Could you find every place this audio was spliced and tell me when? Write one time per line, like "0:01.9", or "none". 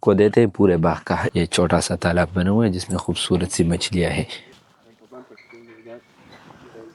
0:01.3
0:04.5